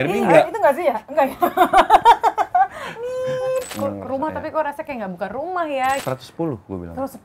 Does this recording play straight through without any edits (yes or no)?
no